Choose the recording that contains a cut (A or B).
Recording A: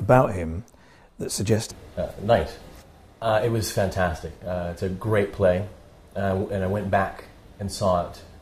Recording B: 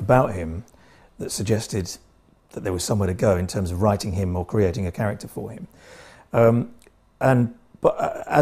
B